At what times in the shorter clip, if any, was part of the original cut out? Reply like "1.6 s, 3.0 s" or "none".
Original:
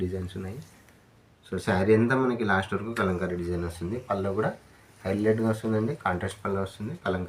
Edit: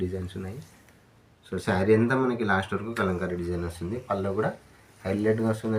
none